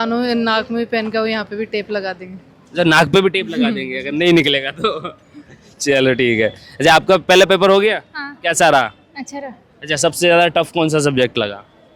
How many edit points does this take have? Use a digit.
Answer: 0